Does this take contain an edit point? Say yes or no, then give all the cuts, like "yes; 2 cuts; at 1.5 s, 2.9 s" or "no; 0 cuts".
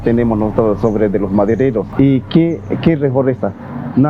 yes; 1 cut; at 1.9 s